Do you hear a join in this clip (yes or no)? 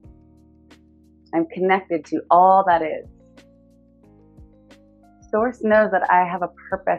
yes